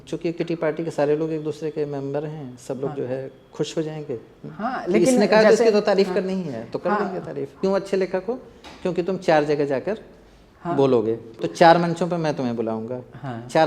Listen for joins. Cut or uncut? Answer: cut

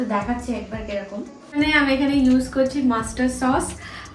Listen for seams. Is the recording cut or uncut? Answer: cut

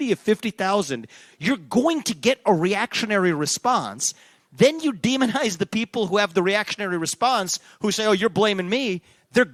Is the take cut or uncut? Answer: uncut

